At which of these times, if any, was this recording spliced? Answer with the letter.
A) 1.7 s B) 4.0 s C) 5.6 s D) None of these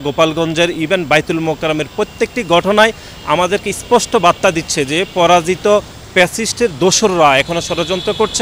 D